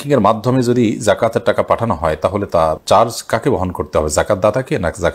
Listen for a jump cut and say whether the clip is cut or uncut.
uncut